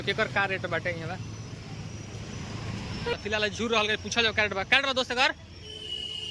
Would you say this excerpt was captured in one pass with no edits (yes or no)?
yes